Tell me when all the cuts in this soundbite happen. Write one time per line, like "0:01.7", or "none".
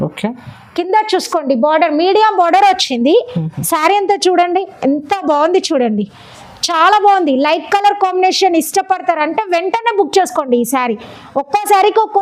none